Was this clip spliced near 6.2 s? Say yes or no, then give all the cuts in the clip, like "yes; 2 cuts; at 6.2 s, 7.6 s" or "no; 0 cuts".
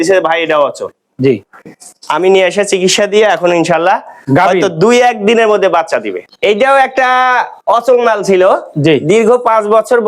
yes; 1 cut; at 6.2 s